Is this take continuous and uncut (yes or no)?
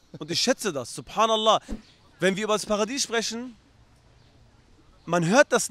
no